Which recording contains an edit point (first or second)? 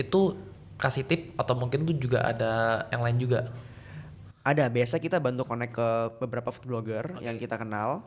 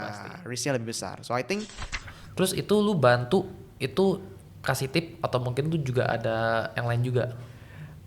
second